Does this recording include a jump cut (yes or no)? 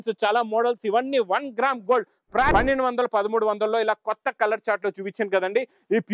yes